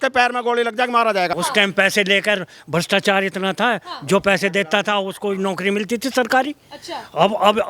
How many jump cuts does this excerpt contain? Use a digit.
1